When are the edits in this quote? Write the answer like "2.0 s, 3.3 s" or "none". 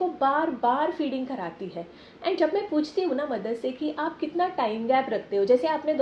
none